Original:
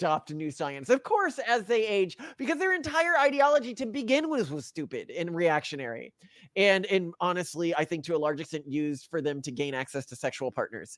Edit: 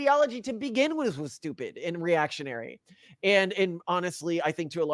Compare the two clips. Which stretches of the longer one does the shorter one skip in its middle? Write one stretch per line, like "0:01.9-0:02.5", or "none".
none